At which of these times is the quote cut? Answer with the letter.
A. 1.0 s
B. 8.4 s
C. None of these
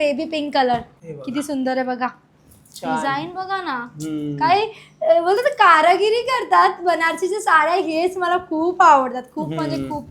A